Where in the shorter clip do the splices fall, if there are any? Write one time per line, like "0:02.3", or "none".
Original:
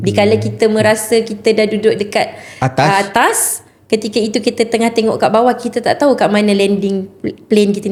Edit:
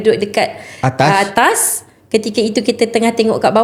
none